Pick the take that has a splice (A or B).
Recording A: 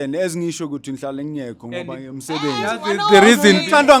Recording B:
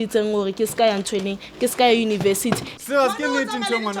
B